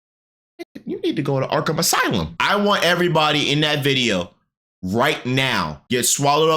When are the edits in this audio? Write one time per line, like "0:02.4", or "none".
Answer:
0:02.3